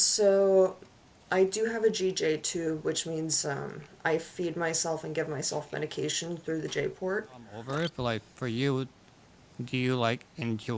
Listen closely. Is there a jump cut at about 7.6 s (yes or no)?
yes